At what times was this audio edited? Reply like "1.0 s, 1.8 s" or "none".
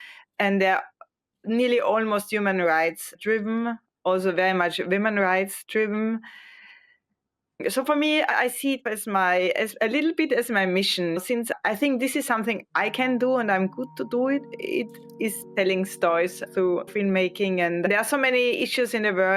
16.9 s, 17.9 s